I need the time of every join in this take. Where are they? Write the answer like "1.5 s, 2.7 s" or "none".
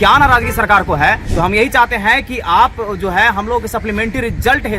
1.2 s